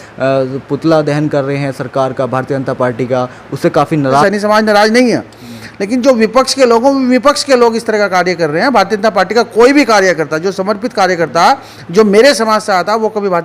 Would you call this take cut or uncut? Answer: cut